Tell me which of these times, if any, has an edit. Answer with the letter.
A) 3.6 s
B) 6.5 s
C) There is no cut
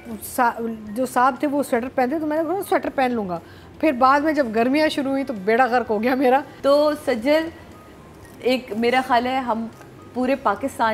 B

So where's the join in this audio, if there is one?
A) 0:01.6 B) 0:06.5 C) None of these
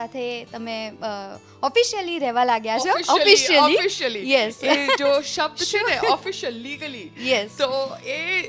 C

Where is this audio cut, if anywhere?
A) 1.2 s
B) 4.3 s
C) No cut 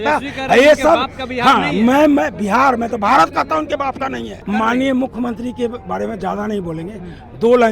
B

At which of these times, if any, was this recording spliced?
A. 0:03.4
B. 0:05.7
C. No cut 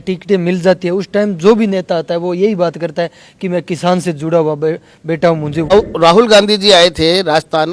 B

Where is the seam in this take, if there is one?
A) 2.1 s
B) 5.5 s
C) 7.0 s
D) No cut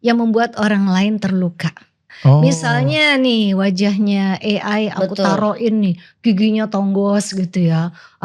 A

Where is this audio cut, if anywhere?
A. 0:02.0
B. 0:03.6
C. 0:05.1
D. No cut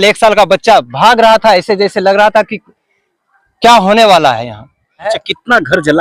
C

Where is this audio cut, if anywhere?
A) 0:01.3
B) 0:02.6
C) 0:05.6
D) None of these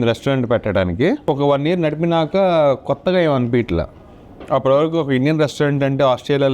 A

